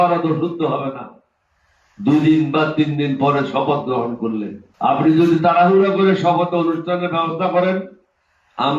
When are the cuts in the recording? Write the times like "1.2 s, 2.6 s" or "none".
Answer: 4.6 s